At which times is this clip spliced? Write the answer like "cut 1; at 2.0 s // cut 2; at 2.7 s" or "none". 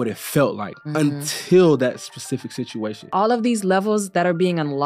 cut 1; at 3.1 s